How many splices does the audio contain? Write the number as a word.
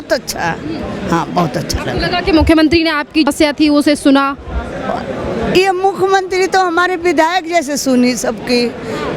one